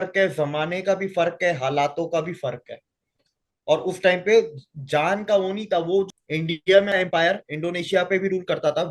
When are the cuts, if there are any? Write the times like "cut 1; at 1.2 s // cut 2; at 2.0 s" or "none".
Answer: cut 1; at 6.1 s